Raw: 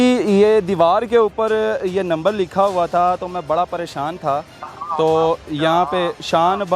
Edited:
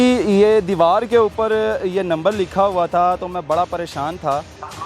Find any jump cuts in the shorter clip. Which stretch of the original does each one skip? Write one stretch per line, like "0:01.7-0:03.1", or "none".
none

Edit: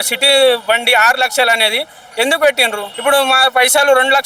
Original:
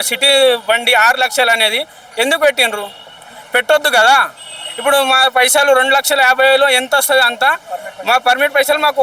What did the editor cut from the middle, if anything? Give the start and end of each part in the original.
0:02.8-0:04.7

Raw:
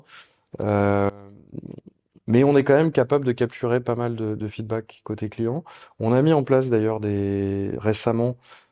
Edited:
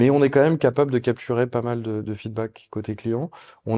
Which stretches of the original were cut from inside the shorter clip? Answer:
none

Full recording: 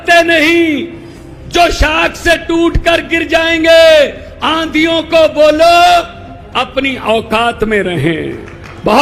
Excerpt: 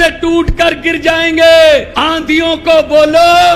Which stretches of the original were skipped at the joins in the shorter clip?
0:04.2-0:04.4

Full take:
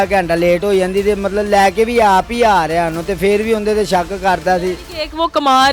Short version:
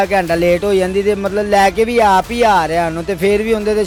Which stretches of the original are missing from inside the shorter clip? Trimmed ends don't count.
none

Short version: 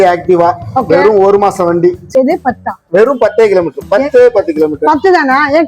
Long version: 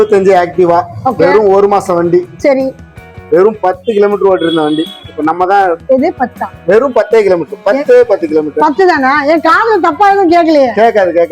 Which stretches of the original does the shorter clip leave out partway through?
0:02.4-0:05.8

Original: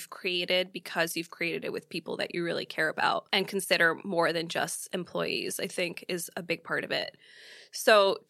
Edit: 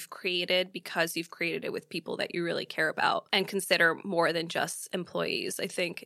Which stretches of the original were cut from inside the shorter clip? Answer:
none

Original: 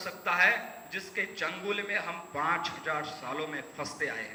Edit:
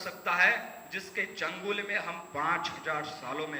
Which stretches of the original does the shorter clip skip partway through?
none

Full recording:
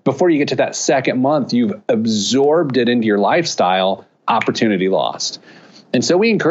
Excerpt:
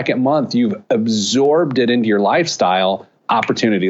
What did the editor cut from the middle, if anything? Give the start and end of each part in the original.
none

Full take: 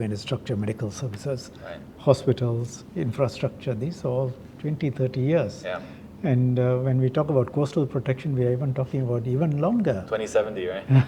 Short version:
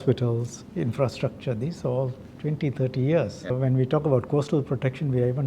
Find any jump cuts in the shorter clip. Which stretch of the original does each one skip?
0:05.7-0:06.7

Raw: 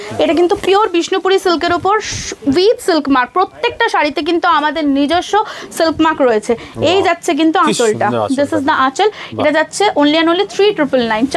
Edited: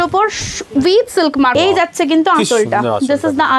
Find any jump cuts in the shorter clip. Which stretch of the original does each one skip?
0:03.2-0:06.8

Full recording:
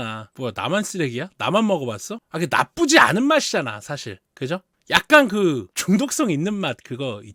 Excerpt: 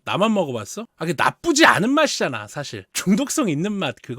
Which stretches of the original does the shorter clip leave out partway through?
0:04.2-0:05.7

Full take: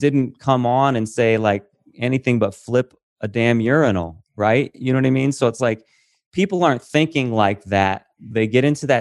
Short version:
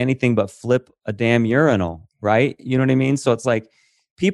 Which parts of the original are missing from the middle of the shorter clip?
0:03.0-0:03.1

